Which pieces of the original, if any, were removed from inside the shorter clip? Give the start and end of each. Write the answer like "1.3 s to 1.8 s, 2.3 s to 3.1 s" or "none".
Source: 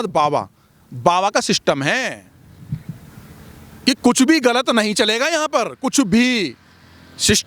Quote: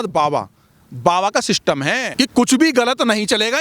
2.1 s to 3.7 s